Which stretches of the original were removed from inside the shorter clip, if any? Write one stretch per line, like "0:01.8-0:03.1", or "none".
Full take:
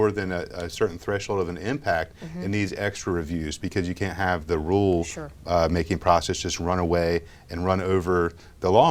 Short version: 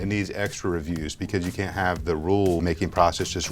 0:05.0-0:05.7

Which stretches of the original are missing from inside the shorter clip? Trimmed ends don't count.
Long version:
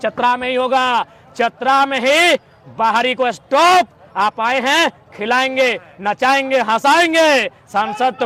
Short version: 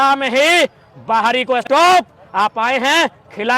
0:03.3-0:03.5

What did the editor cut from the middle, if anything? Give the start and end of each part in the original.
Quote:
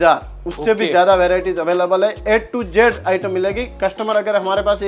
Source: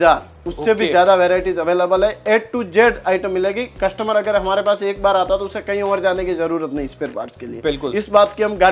none

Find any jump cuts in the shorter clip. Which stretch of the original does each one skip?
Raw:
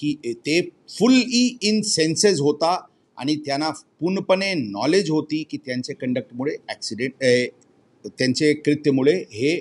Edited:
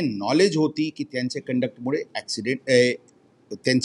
none

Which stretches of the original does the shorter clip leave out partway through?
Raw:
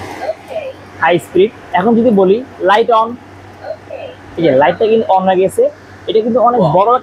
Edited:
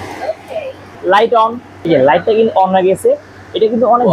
0:00.9-0:02.5
0:03.2-0:04.2

